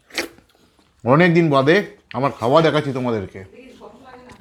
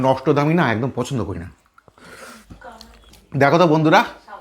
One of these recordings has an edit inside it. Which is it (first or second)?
second